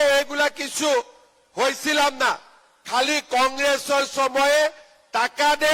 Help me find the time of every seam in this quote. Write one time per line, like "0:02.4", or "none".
none